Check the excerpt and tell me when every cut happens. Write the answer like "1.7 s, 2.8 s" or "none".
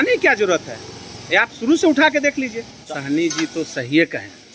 2.8 s